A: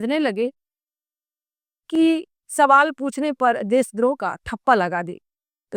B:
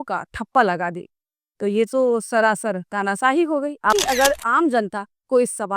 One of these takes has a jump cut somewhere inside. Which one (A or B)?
B